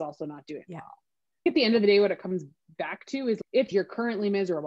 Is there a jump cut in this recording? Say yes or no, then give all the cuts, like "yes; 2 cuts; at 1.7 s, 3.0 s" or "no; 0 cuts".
yes; 2 cuts; at 1.4 s, 3.7 s